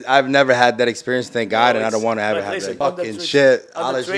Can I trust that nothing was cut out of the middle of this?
no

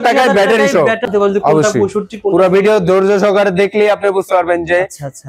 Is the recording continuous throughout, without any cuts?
no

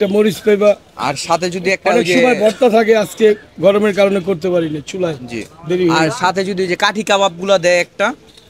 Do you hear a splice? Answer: no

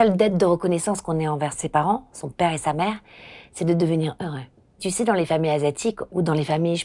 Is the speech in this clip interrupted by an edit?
yes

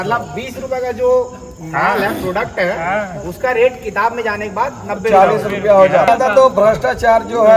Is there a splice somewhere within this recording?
yes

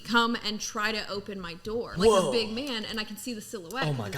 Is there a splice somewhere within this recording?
yes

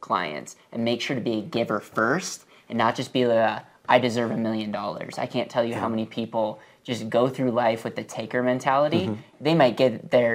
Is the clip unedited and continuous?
no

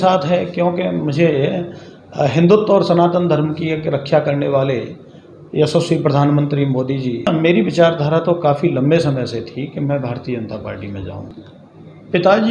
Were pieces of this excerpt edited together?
yes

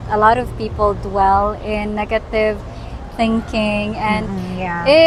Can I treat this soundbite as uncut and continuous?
yes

